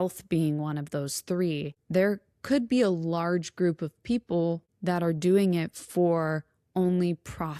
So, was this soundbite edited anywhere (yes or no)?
no